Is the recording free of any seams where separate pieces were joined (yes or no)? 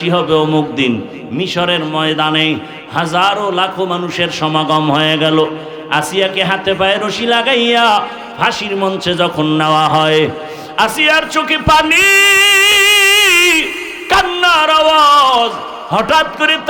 yes